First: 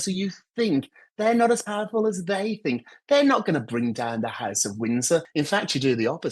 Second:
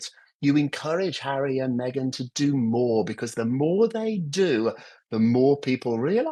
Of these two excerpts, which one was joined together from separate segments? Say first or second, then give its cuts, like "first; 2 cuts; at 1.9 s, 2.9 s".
first; 1 cut; at 5.3 s